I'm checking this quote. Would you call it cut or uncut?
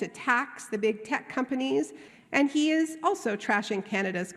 cut